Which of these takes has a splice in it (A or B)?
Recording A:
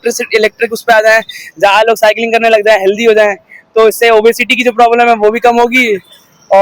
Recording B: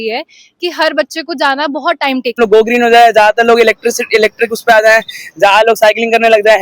B